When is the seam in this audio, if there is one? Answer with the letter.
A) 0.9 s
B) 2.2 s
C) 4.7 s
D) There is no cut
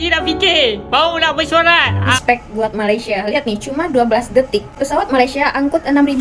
B